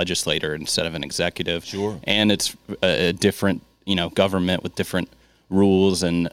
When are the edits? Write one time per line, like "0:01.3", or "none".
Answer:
none